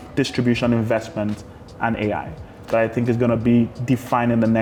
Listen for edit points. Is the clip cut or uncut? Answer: uncut